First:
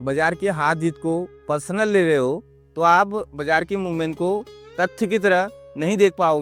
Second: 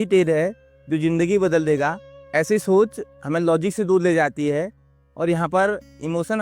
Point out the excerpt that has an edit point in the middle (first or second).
second